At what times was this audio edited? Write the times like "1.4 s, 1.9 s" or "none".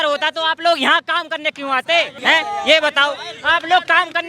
2.2 s